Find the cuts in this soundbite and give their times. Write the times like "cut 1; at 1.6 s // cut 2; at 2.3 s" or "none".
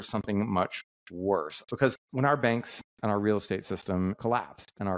cut 1; at 1.6 s // cut 2; at 2.8 s // cut 3; at 4.2 s